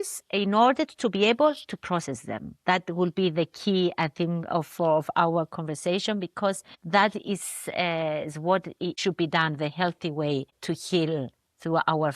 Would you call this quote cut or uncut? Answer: cut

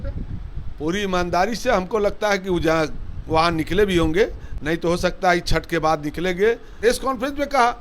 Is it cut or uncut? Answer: cut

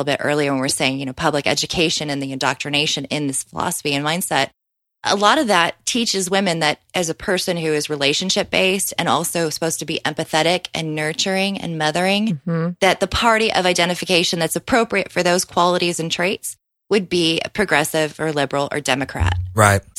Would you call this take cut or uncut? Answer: uncut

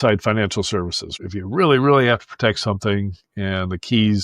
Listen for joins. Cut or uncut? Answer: cut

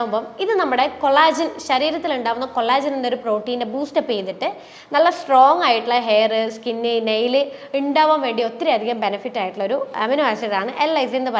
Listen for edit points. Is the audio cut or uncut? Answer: uncut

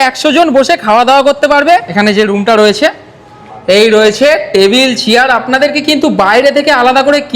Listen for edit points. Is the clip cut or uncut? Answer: cut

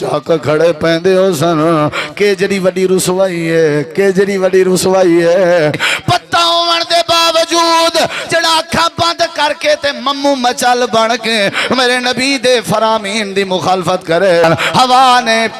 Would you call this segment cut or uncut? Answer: cut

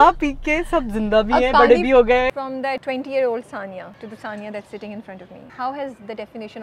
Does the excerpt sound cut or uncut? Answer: cut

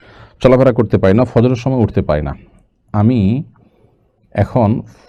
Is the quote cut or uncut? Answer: uncut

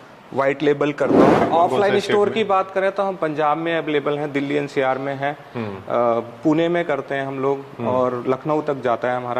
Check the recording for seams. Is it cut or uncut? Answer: cut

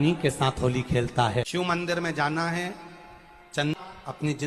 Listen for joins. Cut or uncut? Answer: cut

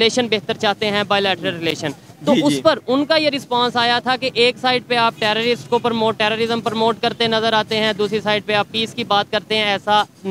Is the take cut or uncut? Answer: uncut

